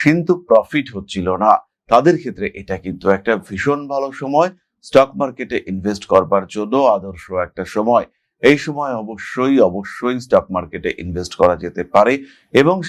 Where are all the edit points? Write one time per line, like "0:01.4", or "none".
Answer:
none